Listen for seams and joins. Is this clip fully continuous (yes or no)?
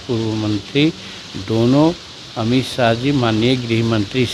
yes